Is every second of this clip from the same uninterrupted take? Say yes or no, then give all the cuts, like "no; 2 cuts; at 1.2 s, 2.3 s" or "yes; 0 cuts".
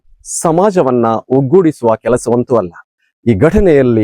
no; 1 cut; at 2.8 s